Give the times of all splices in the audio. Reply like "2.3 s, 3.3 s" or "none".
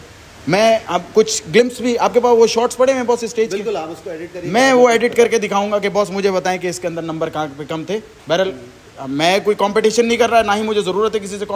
none